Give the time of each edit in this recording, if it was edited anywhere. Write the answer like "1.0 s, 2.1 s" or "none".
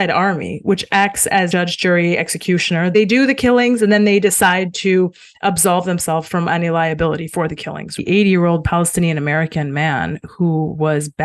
1.5 s, 2.9 s, 8.0 s